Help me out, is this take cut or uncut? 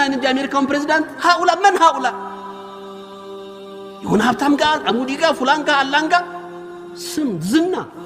cut